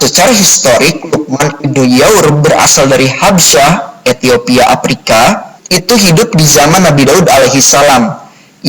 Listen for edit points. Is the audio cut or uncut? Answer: cut